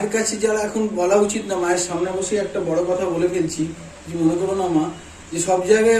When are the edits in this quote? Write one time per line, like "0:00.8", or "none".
none